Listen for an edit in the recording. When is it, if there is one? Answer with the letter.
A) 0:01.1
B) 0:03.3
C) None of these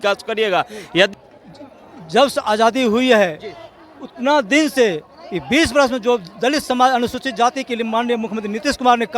A